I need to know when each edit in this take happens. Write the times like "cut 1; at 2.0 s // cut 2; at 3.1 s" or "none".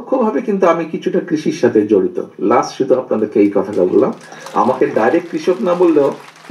none